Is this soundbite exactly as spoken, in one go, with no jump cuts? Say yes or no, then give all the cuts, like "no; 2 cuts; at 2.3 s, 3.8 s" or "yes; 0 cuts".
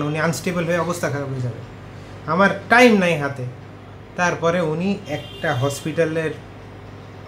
yes; 0 cuts